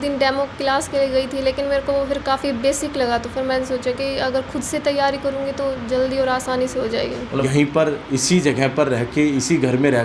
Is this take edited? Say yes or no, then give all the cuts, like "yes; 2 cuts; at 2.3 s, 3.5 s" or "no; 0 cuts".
yes; 1 cut; at 7.5 s